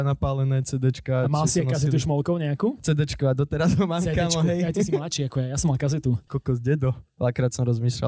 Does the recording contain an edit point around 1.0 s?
no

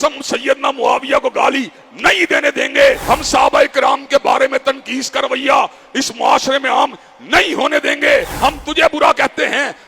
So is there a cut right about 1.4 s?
no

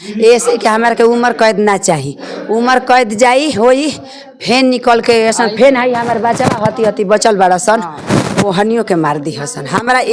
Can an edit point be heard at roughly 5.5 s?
no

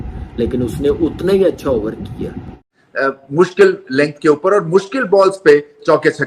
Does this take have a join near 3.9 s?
no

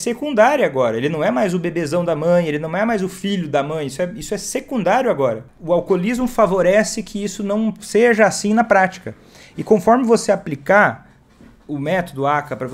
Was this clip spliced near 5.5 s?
yes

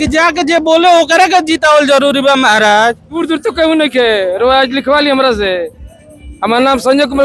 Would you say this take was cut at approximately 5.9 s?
no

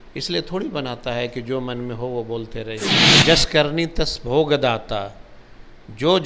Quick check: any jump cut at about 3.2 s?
yes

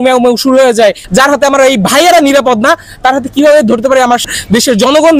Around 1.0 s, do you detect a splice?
yes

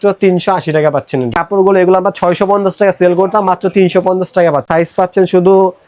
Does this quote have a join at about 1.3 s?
yes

